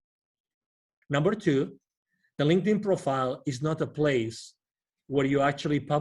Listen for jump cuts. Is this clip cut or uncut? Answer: cut